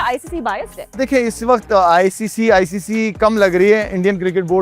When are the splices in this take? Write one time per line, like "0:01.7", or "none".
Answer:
0:01.0